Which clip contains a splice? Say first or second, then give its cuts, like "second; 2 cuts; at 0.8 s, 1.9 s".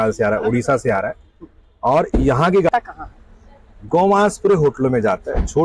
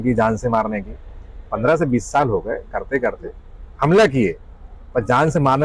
first; 1 cut; at 2.7 s